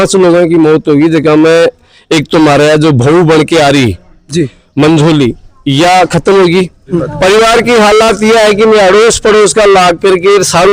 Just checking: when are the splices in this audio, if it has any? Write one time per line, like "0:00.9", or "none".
0:07.0